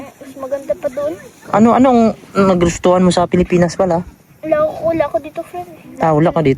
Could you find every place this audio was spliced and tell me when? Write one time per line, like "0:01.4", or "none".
none

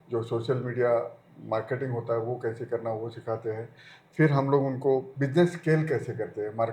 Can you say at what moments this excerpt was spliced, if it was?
0:05.1

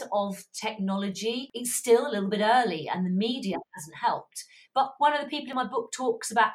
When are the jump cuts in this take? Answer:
0:01.5
0:04.6

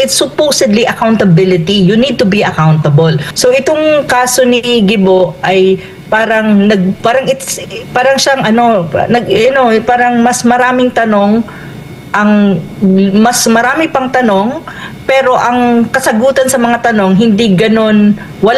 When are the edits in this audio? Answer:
0:03.3

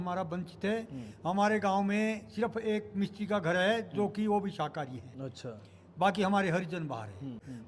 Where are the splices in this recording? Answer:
none

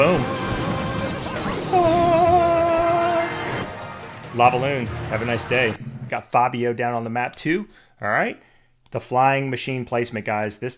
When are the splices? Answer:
0:03.6
0:06.0

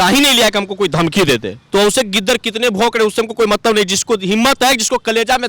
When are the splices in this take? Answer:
0:01.5

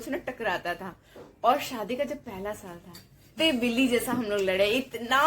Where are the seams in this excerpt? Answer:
0:03.2

